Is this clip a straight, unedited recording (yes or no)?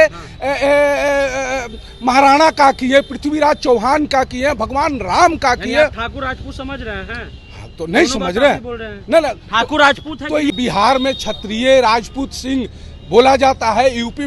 no